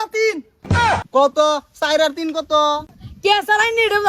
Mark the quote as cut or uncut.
cut